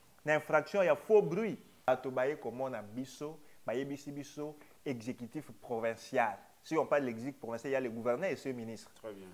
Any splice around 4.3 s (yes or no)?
no